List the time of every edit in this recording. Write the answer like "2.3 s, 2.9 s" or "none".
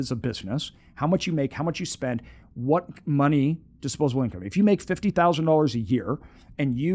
none